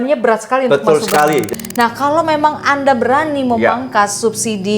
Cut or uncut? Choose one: cut